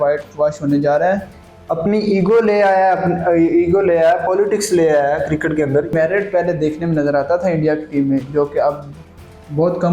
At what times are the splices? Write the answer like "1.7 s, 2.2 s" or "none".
1.3 s, 5.9 s

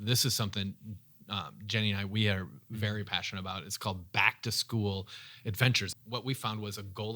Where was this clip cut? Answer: 5.9 s

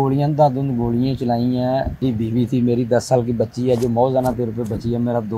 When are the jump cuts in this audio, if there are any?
2.0 s

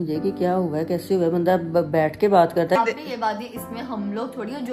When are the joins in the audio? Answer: 2.8 s

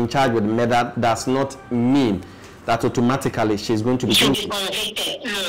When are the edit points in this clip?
none

